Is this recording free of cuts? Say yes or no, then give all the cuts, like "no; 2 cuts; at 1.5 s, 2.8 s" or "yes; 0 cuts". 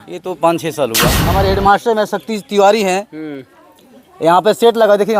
no; 1 cut; at 1.3 s